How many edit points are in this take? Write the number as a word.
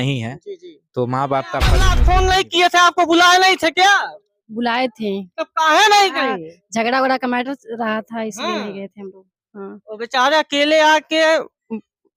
one